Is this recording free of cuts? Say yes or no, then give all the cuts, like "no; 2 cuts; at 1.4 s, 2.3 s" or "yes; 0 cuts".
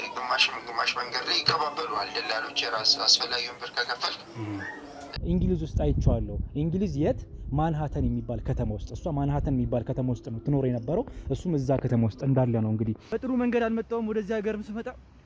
no; 2 cuts; at 5.1 s, 13.0 s